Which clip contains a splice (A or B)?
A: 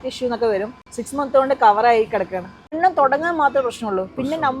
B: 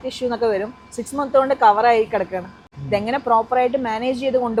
A